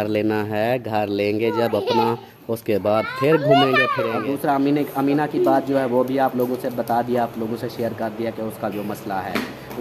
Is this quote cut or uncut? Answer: cut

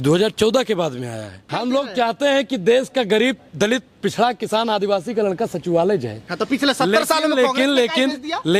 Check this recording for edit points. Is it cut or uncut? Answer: cut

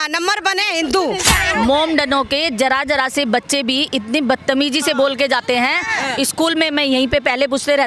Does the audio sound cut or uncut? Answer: cut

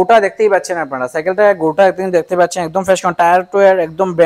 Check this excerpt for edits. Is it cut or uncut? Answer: uncut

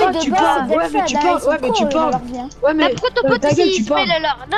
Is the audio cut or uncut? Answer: uncut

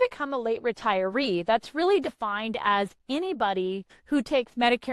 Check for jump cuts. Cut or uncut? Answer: cut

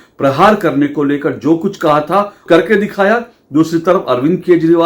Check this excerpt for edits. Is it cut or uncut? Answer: cut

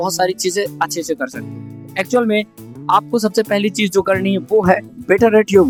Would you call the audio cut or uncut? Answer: uncut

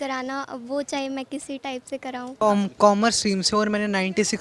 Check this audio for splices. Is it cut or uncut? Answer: cut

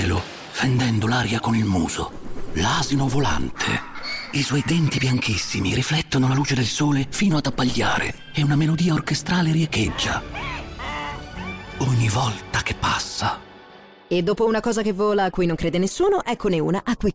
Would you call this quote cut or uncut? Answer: uncut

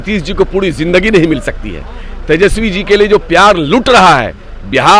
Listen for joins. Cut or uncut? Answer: uncut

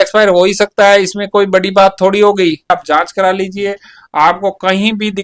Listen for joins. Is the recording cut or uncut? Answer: cut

